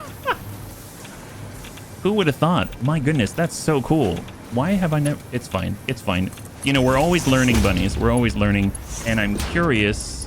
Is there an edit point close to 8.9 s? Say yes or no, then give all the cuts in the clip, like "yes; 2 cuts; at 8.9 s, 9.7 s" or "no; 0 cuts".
yes; 1 cut; at 8.9 s